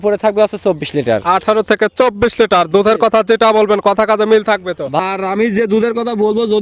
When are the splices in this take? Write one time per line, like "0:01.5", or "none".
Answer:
0:05.0